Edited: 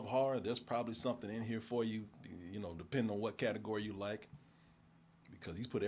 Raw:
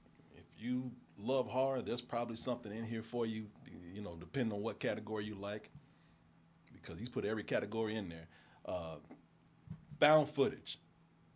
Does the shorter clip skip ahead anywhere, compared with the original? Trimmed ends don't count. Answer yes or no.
no